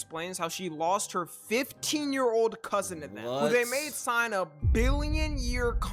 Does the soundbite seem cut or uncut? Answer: uncut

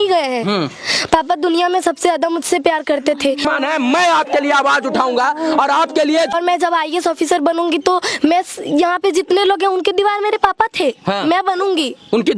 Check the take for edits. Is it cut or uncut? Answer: cut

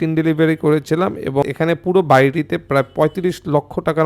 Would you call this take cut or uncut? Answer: cut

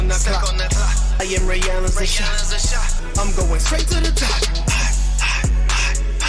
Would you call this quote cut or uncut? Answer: uncut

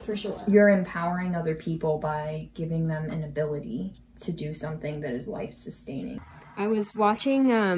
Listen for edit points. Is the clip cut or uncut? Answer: cut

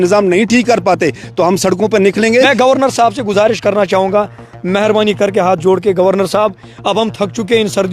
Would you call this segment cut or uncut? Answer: cut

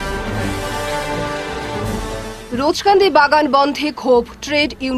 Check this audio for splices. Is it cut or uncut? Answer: uncut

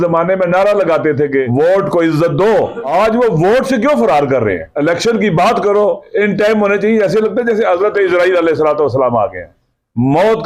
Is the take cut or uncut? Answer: cut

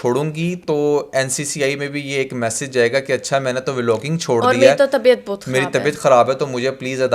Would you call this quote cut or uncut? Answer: uncut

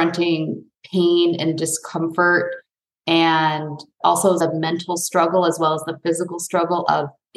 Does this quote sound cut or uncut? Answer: cut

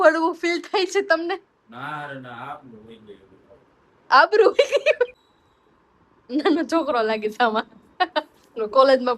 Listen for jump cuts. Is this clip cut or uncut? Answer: cut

